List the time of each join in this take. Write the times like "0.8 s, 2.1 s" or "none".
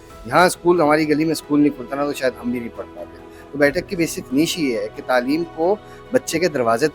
none